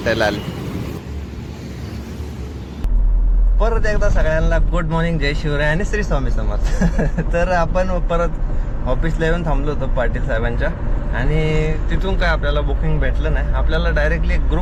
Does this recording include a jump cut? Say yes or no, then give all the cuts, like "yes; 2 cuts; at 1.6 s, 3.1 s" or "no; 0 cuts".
no; 0 cuts